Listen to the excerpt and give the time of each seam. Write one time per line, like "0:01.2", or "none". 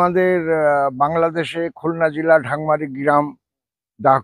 none